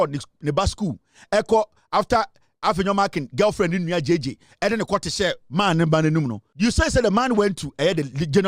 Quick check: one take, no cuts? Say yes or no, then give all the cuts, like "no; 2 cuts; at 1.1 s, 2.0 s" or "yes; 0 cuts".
no; 1 cut; at 6.4 s